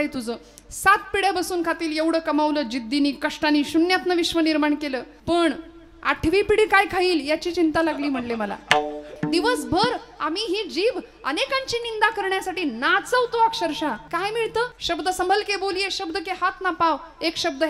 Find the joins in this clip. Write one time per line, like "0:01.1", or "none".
0:05.1
0:09.1
0:14.0
0:14.8